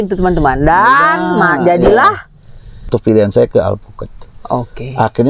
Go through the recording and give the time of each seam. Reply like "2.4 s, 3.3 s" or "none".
2.9 s